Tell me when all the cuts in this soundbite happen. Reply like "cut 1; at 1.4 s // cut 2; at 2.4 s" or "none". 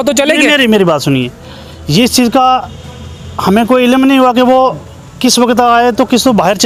none